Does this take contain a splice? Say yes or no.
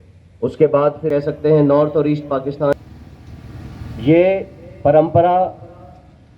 yes